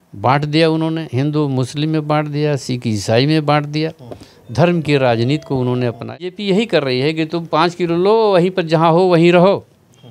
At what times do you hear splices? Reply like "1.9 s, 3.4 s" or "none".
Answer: 6.4 s